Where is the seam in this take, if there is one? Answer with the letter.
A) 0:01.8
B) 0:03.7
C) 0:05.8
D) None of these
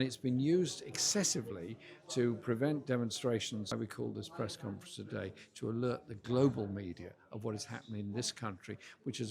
B